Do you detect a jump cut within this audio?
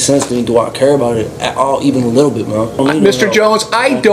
yes; 1 cut; at 2.8 s

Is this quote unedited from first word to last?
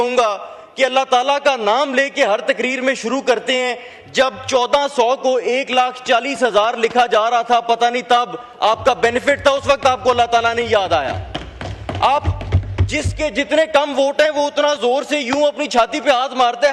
yes; 0 cuts

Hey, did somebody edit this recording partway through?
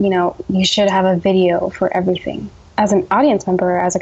yes; 1 cut; at 2.6 s

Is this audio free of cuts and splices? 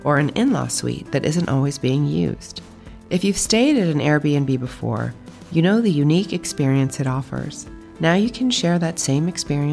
yes; 0 cuts

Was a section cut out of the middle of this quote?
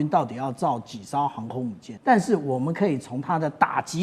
yes; 1 cut; at 1.9 s

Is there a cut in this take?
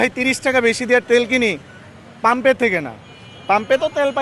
no; 0 cuts

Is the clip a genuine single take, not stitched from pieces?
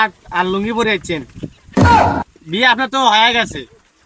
no; 2 cuts; at 1.4 s, 2.4 s

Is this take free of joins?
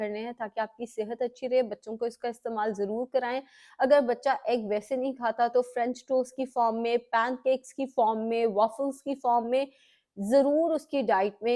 yes; 0 cuts

